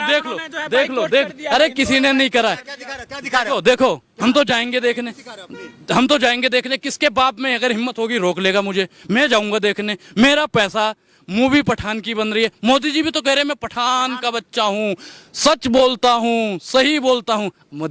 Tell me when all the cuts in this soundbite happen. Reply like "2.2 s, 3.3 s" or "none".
none